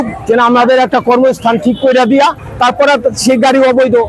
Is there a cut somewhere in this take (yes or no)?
no